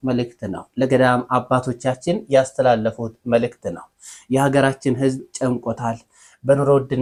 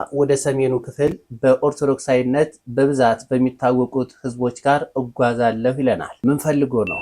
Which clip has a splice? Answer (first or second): second